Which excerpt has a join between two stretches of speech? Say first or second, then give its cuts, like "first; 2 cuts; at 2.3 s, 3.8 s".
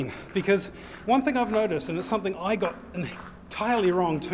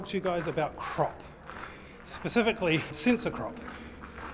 second; 1 cut; at 3.0 s